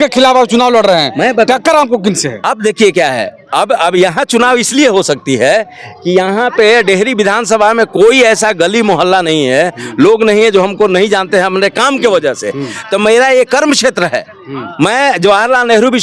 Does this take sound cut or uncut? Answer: uncut